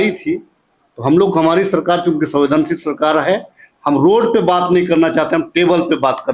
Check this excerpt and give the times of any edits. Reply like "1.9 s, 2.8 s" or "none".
none